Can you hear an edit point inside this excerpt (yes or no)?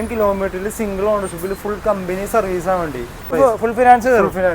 yes